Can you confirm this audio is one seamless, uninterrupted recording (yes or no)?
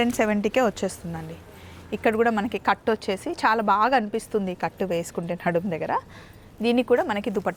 yes